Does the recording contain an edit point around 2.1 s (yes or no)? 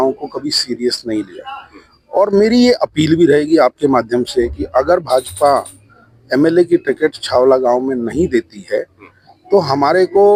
no